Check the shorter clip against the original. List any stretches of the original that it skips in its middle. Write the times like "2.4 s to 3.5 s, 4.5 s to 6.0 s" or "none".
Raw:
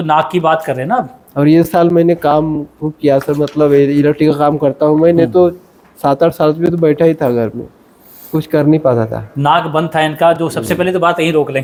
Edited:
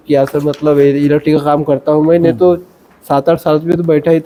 none